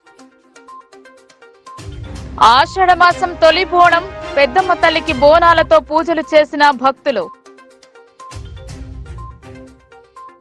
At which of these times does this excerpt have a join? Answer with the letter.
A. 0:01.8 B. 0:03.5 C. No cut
A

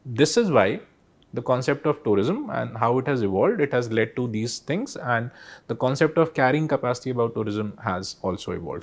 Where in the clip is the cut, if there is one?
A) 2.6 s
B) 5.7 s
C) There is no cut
C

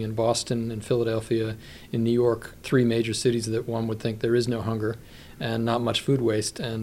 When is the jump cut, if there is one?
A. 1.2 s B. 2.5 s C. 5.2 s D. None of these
B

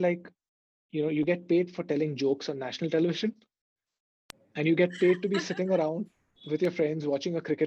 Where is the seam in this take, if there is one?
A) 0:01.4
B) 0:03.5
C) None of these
C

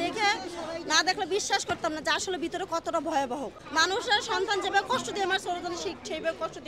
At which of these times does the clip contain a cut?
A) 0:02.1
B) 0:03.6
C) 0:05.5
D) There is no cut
B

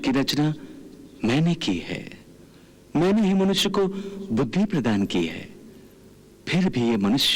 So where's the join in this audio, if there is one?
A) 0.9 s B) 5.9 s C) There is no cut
C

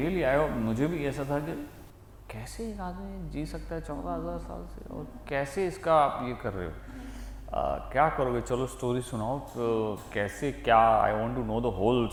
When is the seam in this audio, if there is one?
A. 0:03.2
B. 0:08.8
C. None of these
C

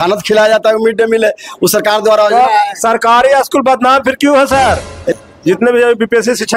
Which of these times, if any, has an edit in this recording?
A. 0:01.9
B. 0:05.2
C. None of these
B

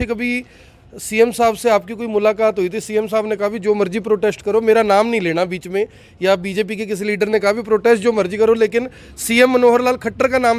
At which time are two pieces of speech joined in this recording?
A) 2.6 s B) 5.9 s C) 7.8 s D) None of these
D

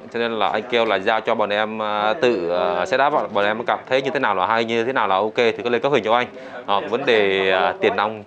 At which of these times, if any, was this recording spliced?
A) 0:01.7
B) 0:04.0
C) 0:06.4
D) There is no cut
D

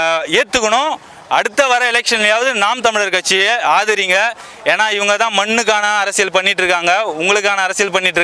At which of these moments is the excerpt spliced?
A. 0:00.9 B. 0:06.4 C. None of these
C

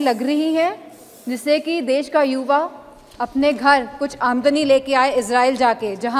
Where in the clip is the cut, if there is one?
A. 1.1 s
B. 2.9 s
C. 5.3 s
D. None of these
D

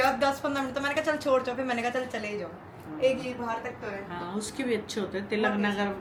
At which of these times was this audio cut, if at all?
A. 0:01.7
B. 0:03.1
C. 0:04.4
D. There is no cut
D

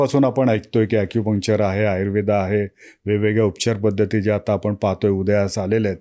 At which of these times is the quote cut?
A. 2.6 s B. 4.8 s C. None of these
C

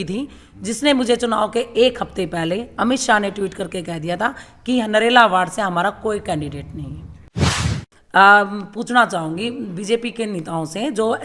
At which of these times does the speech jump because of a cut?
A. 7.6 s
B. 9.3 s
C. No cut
A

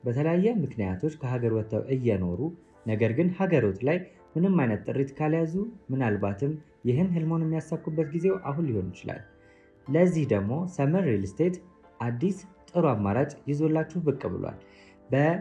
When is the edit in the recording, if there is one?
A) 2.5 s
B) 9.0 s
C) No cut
C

